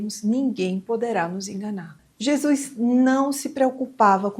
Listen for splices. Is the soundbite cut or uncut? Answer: cut